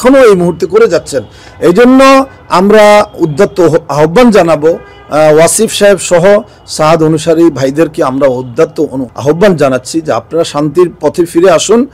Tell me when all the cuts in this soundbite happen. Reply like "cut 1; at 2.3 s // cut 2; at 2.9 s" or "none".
none